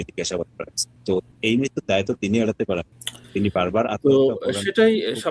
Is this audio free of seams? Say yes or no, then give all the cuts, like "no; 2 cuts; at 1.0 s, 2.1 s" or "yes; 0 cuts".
yes; 0 cuts